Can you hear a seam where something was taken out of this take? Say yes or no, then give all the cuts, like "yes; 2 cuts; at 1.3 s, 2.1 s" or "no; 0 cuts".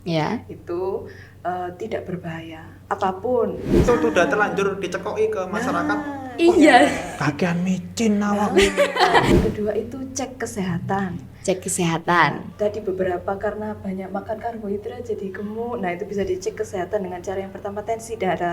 yes; 2 cuts; at 3.8 s, 9.3 s